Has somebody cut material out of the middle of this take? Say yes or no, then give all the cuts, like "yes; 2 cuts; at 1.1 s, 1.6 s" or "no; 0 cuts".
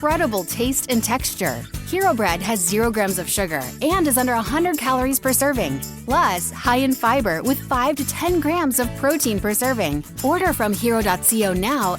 yes; 2 cuts; at 5.9 s, 10.1 s